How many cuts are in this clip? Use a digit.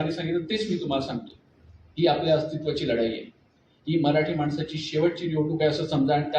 0